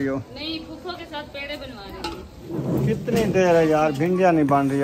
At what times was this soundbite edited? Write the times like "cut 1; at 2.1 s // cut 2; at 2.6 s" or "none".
cut 1; at 2.3 s

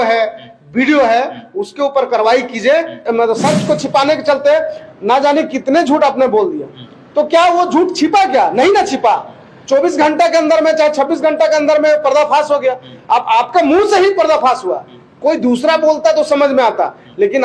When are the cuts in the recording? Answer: cut 1; at 3.0 s

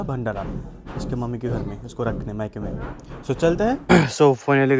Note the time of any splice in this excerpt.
cut 1; at 3.8 s

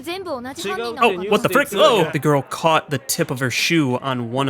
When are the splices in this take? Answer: cut 1; at 2.1 s

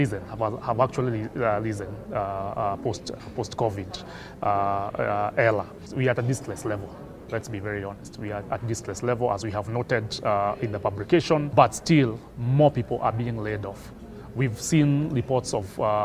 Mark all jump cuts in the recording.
cut 1; at 5.8 s // cut 2; at 11.5 s

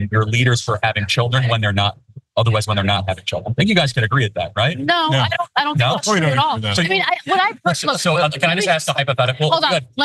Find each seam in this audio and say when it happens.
cut 1; at 5.9 s

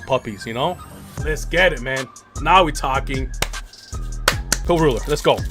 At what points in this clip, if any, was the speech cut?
cut 1; at 4.6 s

